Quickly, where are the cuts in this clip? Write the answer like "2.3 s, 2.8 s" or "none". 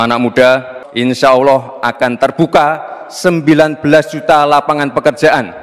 none